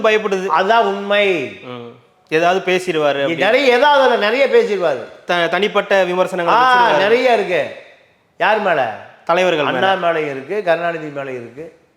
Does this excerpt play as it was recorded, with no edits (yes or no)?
yes